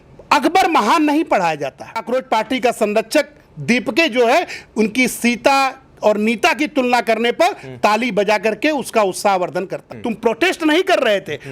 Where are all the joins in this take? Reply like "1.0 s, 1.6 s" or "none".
2.0 s, 9.9 s

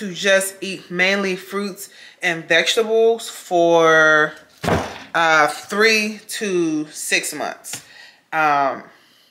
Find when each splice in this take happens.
none

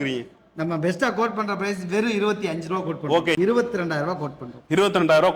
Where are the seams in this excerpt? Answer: 3.4 s

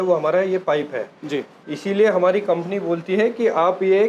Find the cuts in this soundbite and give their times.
1.5 s

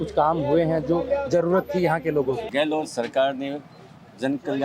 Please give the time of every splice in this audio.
2.4 s

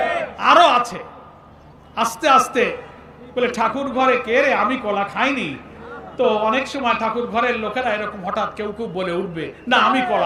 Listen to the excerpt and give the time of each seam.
none

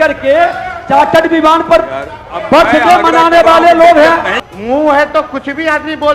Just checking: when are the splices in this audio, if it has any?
4.4 s

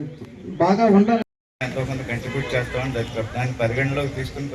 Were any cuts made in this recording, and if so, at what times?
none

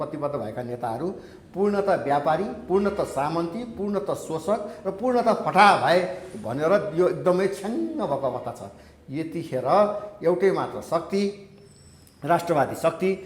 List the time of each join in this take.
none

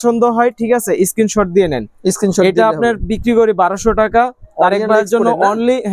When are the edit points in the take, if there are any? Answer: none

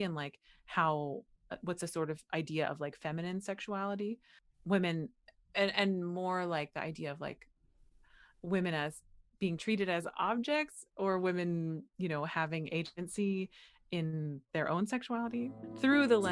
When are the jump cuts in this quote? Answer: none

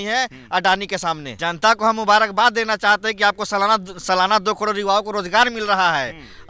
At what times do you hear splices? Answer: 1.3 s

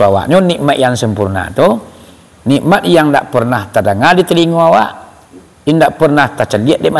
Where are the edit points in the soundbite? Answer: none

